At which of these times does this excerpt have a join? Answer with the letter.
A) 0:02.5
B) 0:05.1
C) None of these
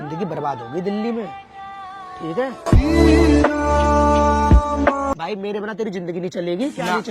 B